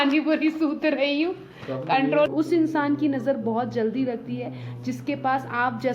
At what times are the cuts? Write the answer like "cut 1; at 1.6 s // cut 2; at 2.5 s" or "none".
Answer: cut 1; at 2.3 s